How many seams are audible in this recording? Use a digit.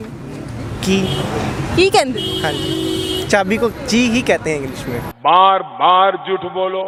0